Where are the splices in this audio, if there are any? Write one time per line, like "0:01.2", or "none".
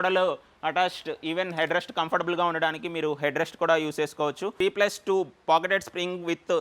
0:04.5